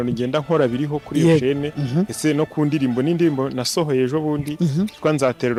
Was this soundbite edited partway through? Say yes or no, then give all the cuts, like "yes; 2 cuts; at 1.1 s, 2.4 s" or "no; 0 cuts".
no; 0 cuts